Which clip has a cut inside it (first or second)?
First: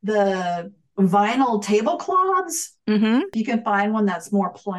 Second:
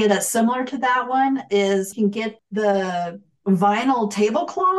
first